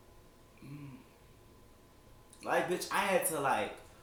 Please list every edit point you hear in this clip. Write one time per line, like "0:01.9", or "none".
none